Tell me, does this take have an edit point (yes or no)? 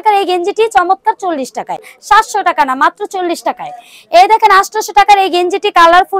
yes